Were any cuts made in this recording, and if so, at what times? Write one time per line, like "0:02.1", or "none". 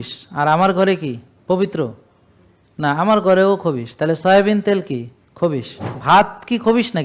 0:05.9